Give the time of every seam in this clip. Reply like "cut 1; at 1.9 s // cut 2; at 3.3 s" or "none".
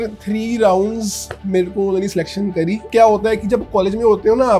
none